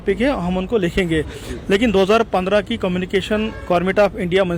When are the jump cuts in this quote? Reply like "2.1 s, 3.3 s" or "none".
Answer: none